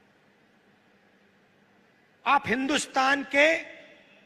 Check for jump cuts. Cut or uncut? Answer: uncut